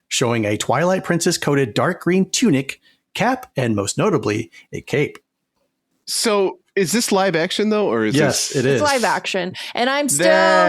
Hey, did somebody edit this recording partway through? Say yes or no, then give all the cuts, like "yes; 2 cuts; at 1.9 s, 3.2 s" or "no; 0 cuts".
yes; 1 cut; at 5.5 s